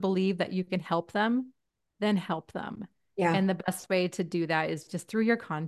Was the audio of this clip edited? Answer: no; 0 cuts

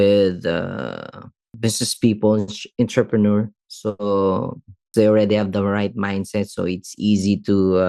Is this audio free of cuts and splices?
no; 2 cuts; at 1.5 s, 4.9 s

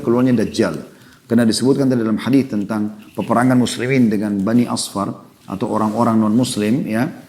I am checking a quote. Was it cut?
no; 0 cuts

